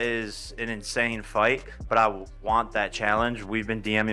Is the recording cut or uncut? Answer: uncut